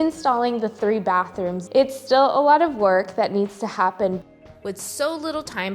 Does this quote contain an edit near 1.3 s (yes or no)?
no